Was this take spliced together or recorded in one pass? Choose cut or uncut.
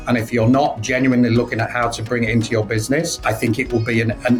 uncut